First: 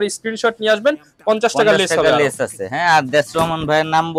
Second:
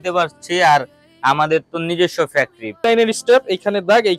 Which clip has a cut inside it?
second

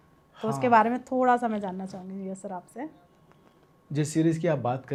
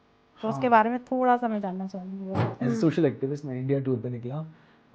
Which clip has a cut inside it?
second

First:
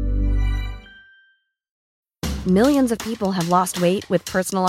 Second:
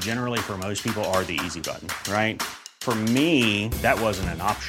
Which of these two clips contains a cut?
first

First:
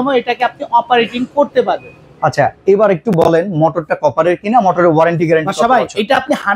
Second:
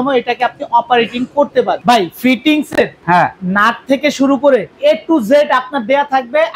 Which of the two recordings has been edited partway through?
second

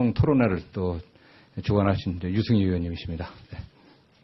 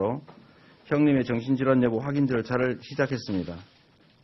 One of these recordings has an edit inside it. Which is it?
second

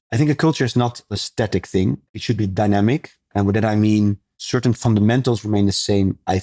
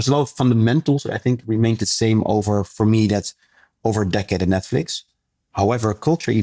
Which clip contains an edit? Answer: first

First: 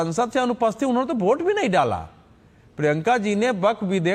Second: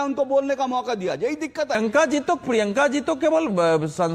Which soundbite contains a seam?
second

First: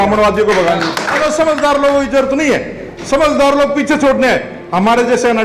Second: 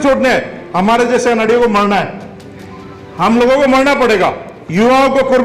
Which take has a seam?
first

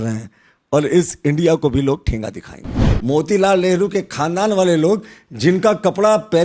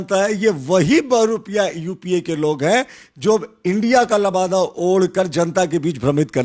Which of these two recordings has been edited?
first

